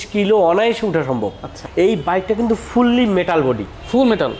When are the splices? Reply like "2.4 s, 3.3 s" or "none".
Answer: 1.6 s